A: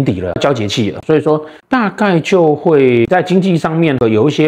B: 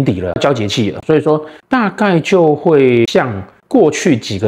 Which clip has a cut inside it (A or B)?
A